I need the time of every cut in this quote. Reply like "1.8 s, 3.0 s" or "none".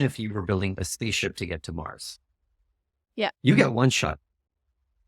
none